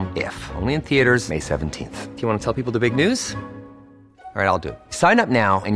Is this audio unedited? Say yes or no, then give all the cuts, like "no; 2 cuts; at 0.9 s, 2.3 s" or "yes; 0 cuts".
yes; 0 cuts